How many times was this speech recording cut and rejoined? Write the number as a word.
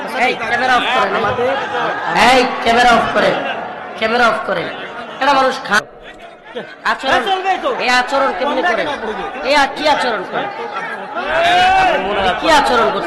one